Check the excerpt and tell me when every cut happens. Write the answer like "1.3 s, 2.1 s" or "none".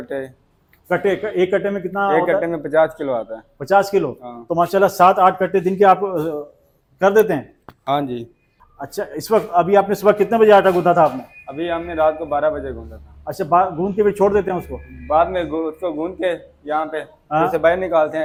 none